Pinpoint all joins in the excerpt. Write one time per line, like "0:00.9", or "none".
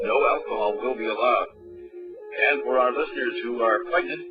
0:02.1